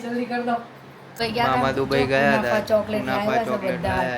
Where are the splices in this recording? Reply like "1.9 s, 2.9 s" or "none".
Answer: 1.2 s